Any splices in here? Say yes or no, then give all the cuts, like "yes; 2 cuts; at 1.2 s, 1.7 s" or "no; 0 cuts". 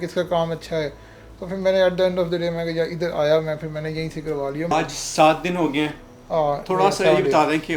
no; 0 cuts